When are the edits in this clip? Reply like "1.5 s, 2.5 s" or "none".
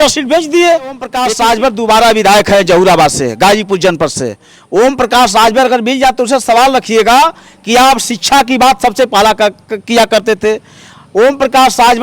1.1 s